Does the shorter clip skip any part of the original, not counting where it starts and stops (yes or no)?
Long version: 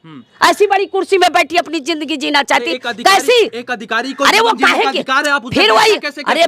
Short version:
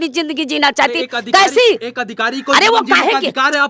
no